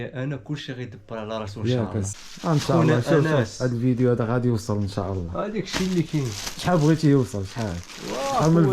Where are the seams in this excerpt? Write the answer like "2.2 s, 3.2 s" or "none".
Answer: 2.1 s